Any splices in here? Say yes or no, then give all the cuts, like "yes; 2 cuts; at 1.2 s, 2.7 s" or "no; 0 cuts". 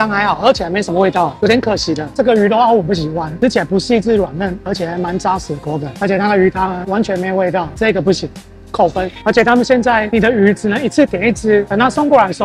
no; 0 cuts